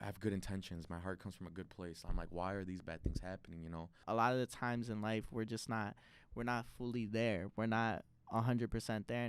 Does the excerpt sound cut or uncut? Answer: cut